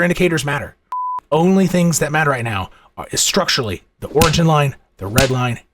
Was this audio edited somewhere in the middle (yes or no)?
yes